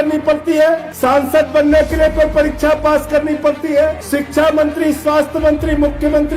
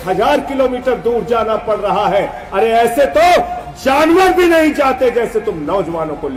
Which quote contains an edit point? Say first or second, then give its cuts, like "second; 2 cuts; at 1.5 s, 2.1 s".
first; 2 cuts; at 0.9 s, 4.0 s